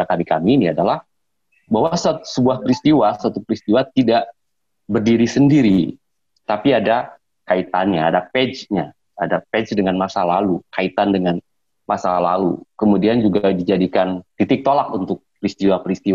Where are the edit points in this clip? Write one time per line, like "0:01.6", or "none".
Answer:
0:14.3